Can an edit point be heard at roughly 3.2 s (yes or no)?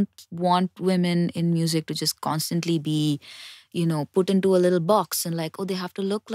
no